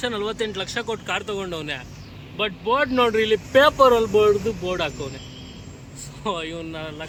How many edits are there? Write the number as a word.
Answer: zero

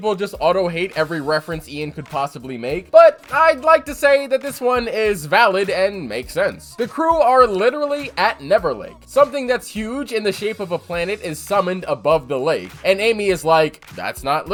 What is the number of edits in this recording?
zero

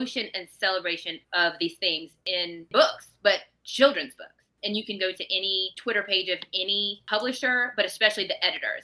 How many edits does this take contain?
five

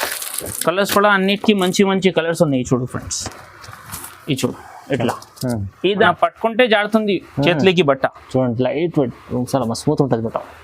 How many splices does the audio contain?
one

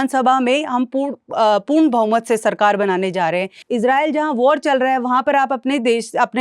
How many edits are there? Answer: one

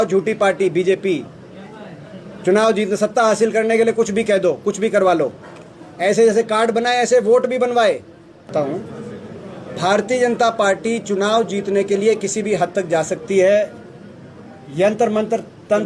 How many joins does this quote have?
one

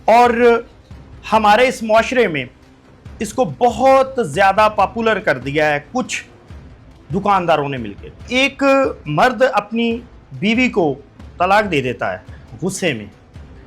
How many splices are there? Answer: two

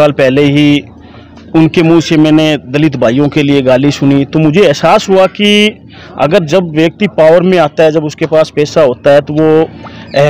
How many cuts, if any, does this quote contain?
zero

